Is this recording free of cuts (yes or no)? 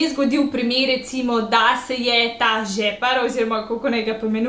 yes